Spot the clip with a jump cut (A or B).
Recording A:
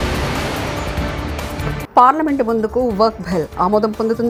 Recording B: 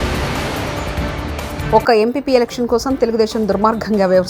B